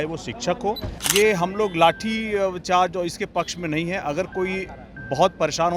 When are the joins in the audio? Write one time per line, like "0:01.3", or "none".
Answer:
0:00.9